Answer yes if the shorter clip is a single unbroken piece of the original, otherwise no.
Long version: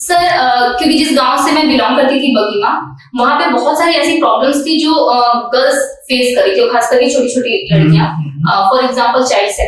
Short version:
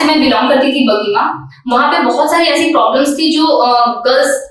yes